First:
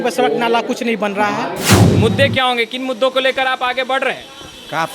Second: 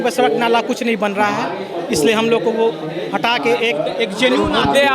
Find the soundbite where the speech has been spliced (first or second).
first